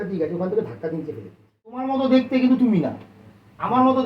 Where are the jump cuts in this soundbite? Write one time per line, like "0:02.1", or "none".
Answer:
0:01.8